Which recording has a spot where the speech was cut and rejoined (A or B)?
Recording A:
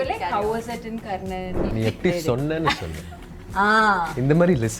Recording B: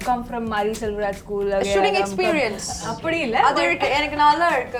A